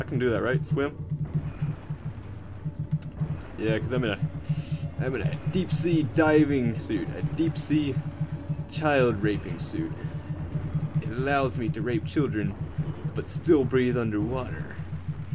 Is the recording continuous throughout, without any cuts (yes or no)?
no